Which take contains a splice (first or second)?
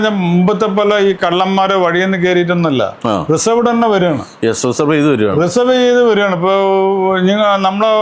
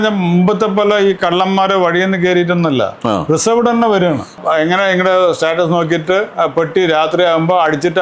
second